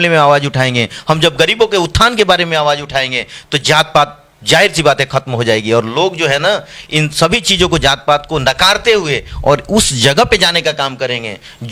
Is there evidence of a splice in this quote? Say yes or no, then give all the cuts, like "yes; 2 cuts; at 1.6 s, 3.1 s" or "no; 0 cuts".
no; 0 cuts